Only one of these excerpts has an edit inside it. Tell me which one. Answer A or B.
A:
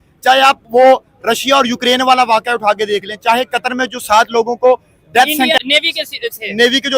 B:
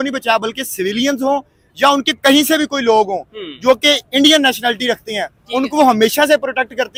A